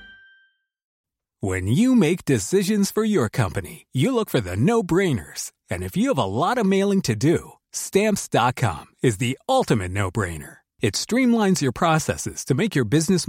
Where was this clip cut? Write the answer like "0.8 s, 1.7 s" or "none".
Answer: 1.0 s